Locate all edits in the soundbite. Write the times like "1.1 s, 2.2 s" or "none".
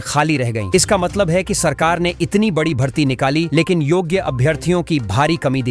none